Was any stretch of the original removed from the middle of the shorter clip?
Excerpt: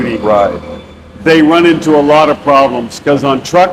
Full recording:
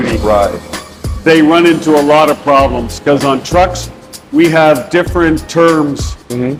no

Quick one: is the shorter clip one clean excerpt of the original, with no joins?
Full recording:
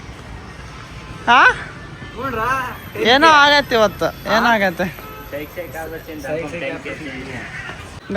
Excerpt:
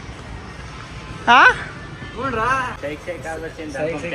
no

